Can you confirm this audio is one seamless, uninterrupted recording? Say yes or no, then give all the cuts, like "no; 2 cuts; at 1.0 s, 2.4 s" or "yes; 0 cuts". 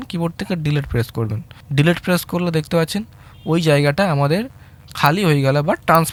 yes; 0 cuts